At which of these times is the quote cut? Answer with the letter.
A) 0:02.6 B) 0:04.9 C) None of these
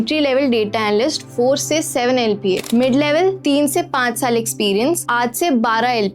A